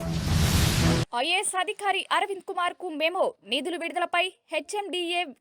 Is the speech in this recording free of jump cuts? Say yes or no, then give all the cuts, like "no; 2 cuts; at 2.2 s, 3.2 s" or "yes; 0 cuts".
no; 1 cut; at 1.0 s